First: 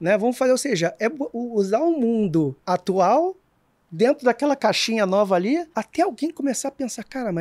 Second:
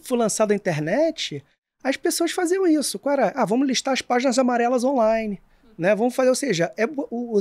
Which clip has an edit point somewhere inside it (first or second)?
first